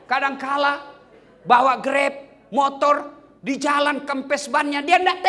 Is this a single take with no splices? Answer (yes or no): yes